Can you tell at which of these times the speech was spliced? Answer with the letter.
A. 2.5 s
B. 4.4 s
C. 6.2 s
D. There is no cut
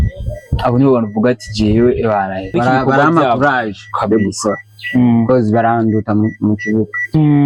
A